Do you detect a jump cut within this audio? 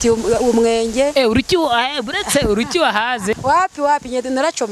yes; 1 cut; at 3.4 s

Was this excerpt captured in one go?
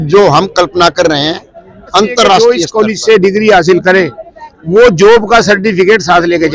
no; 1 cut; at 2.4 s

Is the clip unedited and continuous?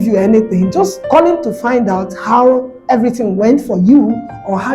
no; 1 cut; at 1.0 s

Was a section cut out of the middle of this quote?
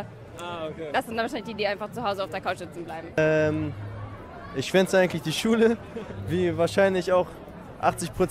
yes; 1 cut; at 3.2 s

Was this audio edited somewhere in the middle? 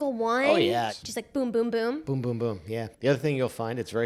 yes; 1 cut; at 2.9 s

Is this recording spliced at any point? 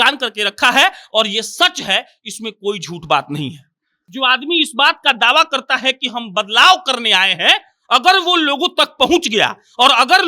yes; 1 cut; at 4.0 s

